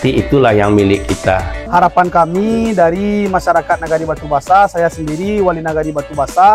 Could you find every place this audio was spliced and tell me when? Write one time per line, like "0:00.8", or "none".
0:01.5